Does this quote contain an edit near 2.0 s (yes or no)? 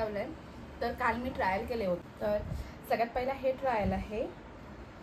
yes